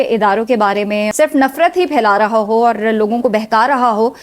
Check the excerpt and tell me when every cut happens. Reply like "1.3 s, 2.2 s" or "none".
1.1 s